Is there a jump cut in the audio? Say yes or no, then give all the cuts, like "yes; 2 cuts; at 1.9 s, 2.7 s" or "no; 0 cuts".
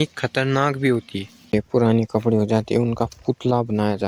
yes; 1 cut; at 1.5 s